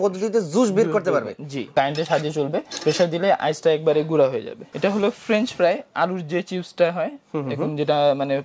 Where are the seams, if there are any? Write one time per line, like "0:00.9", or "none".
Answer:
0:01.7
0:04.6